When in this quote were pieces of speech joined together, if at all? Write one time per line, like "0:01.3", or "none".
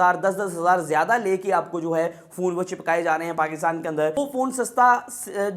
0:04.2